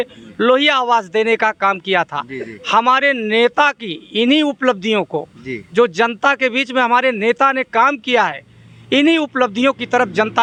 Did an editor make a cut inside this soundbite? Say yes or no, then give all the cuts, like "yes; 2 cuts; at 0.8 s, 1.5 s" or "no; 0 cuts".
no; 0 cuts